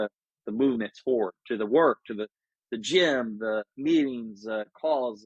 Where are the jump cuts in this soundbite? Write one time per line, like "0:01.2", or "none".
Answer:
none

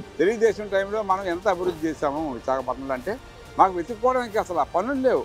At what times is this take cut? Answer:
none

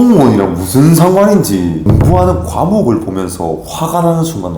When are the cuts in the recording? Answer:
0:01.8

